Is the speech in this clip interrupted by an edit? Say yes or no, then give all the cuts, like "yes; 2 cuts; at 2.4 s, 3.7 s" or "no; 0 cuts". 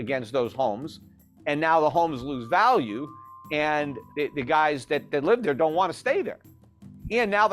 yes; 1 cut; at 4.0 s